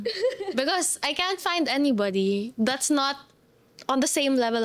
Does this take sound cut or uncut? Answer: uncut